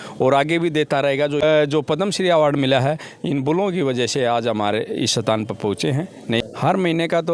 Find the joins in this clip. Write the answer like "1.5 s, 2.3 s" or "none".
1.4 s, 6.4 s